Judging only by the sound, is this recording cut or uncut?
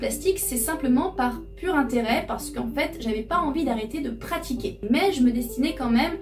uncut